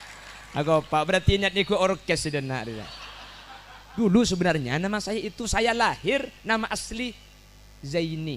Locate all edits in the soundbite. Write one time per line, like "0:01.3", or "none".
0:04.0